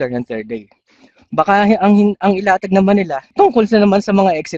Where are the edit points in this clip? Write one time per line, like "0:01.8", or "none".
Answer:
0:03.2